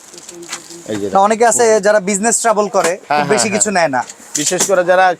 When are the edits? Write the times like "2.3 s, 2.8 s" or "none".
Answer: none